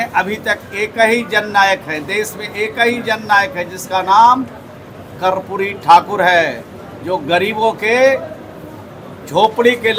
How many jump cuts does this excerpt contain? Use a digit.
0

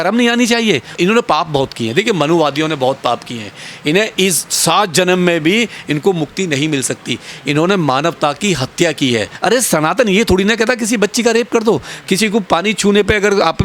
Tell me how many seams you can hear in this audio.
2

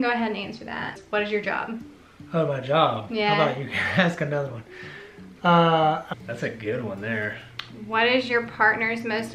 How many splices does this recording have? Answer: 2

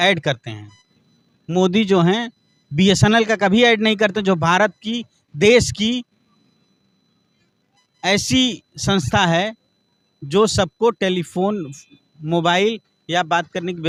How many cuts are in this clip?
0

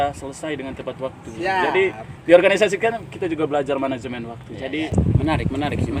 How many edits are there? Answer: 1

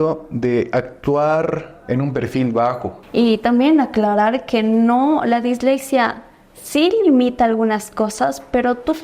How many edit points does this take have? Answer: 1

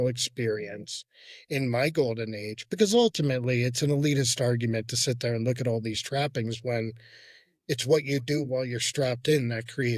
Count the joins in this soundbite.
0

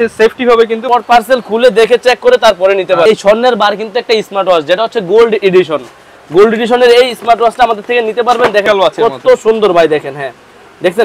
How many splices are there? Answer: 3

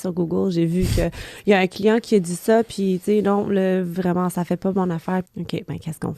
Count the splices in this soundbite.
1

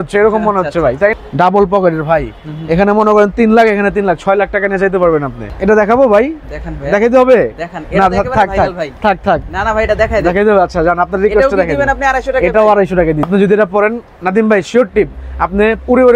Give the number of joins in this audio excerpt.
3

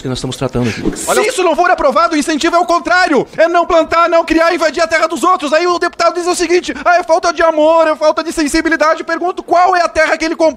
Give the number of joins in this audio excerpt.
1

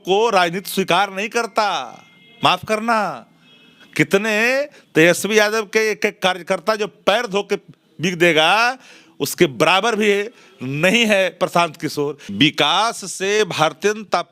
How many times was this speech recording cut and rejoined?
1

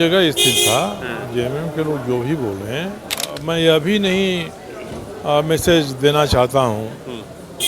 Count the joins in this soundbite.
1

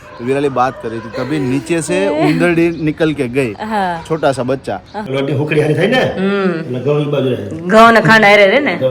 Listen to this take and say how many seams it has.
1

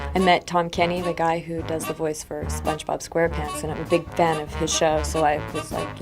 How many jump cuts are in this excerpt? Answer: 1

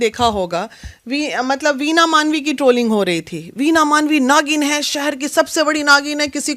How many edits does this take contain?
0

